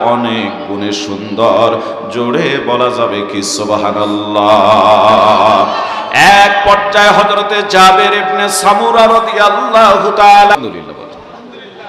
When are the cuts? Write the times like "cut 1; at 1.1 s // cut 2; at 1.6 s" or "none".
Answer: cut 1; at 10.5 s

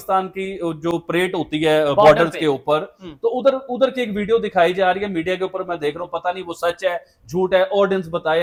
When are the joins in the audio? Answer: none

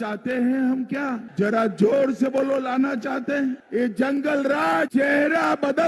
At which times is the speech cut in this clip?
cut 1; at 1.3 s // cut 2; at 3.6 s // cut 3; at 4.9 s

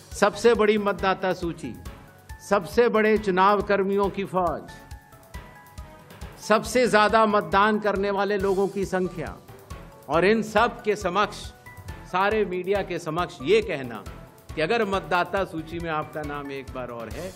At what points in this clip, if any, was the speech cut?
none

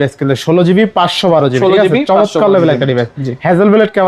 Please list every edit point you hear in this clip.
none

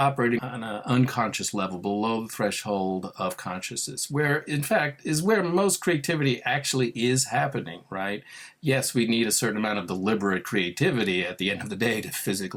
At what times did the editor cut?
none

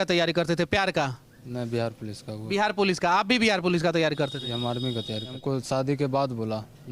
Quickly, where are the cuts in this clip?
cut 1; at 5.3 s

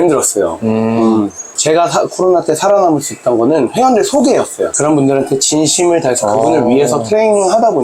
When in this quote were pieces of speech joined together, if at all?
cut 1; at 1.5 s // cut 2; at 4.7 s

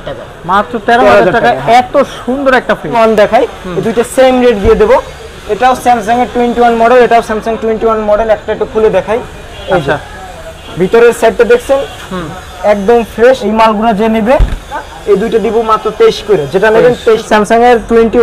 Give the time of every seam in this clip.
cut 1; at 2.9 s // cut 2; at 13.4 s // cut 3; at 14.9 s // cut 4; at 17.2 s

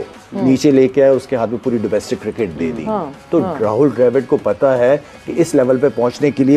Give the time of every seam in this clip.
none

